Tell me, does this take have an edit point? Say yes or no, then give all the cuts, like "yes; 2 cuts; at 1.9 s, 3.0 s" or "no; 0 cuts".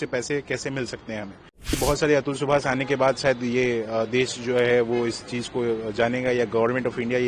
yes; 1 cut; at 1.8 s